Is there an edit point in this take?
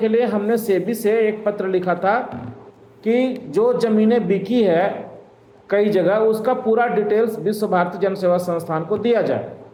no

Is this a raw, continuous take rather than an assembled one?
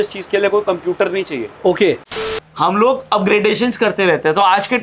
no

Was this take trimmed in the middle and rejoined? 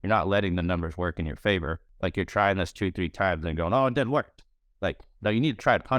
yes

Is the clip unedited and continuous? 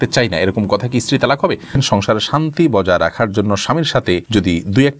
no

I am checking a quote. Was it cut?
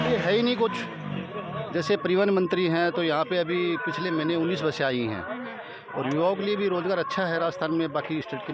no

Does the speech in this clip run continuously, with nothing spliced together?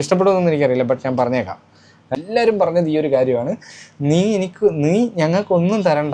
no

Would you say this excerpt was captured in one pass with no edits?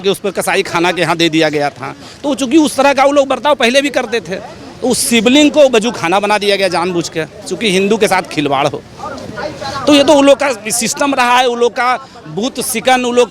yes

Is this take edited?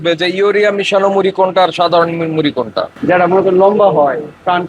yes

